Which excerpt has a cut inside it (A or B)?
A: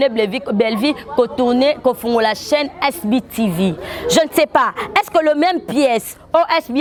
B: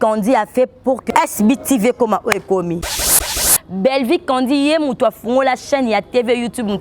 B